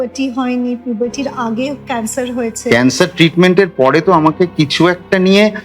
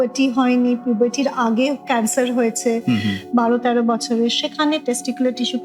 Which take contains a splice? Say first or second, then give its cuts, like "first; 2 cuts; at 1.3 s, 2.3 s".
first; 1 cut; at 2.6 s